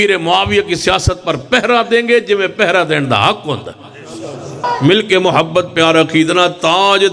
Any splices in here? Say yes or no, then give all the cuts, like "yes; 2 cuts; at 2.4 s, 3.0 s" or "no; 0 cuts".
yes; 1 cut; at 4.6 s